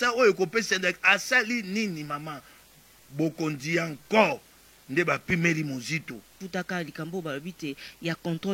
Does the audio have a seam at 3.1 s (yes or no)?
no